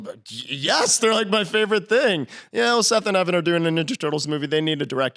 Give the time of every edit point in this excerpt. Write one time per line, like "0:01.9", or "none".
none